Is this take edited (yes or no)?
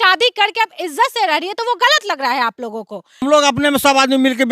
yes